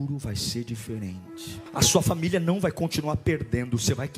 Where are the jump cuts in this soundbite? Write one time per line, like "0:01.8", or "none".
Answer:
0:01.6